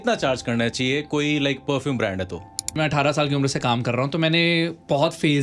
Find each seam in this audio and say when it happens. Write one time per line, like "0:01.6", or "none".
0:02.7